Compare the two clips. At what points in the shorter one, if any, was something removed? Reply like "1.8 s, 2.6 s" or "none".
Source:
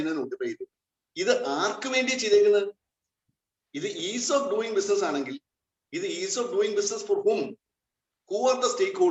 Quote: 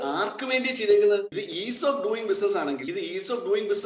1.4 s, 2.9 s

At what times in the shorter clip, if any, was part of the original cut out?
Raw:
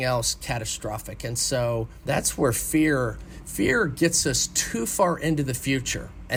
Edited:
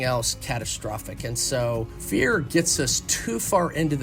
1.9 s

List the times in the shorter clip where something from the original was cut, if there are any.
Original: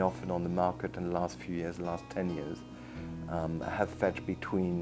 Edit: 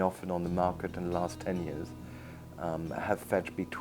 1.4 s

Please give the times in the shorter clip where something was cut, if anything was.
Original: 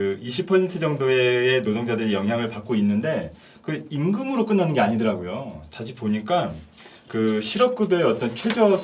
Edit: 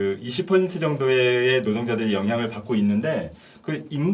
none

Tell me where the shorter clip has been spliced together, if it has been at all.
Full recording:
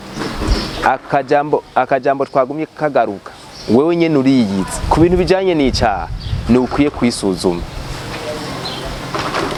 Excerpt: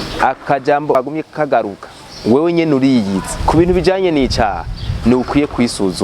0.9 s

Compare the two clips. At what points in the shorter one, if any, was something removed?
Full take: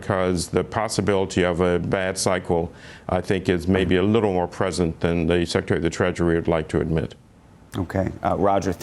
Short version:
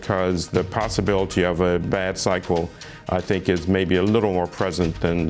none

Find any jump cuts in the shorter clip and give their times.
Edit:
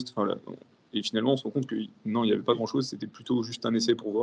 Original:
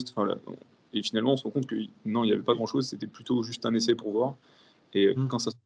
none

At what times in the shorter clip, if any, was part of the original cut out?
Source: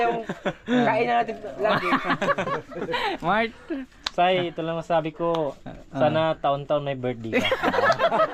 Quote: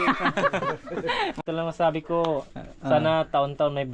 1.4 s

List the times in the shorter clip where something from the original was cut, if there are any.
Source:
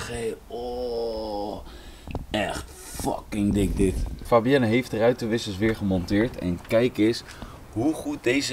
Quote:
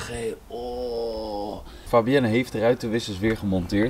1.7 s

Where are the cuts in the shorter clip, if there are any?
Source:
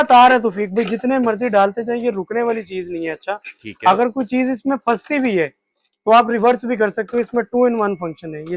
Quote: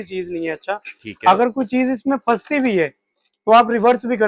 none

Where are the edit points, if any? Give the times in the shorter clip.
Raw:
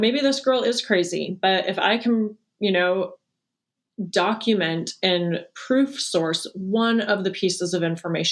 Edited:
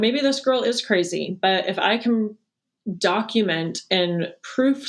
2.4 s

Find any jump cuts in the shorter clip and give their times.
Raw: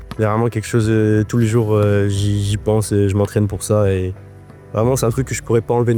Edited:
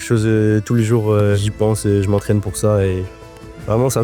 1.4 s

